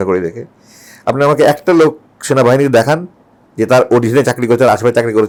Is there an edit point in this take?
no; 0 cuts

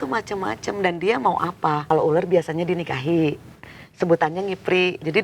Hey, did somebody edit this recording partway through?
yes; 1 cut; at 1.8 s

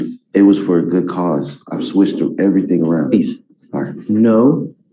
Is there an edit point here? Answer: no; 0 cuts

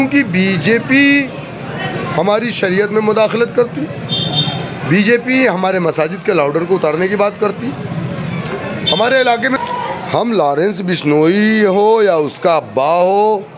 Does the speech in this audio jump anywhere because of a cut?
yes; 1 cut; at 9.6 s

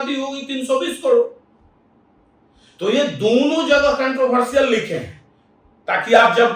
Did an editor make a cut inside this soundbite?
no; 0 cuts

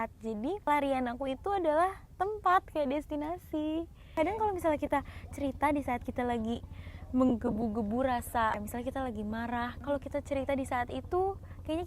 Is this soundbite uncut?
no; 4 cuts; at 0.7 s, 4.0 s, 8.6 s, 9.8 s

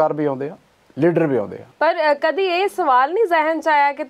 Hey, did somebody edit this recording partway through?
yes; 1 cut; at 1.6 s

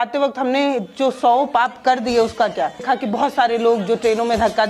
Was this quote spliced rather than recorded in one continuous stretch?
yes; 1 cut; at 2.8 s

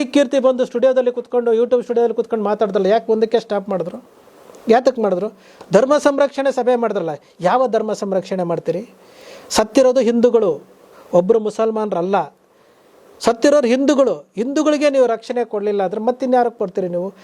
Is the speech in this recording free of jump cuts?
yes; 0 cuts

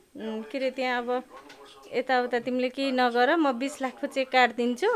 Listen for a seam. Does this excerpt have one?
no; 0 cuts

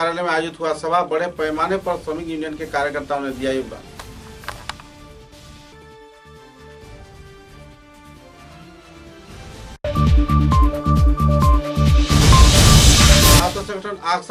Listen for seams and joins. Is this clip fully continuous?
yes; 0 cuts

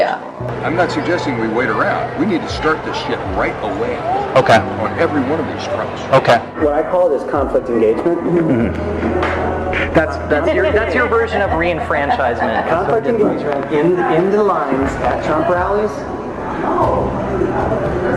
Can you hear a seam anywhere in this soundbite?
yes; 1 cut; at 11.5 s

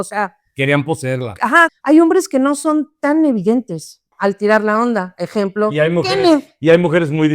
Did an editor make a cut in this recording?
yes; 2 cuts; at 1.7 s, 4.1 s

